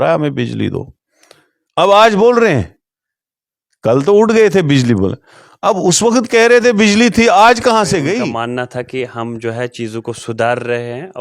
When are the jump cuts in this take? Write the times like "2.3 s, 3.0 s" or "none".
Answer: 8.3 s